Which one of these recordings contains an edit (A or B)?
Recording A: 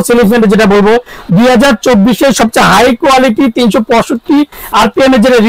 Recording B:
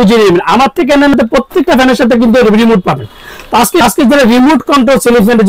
B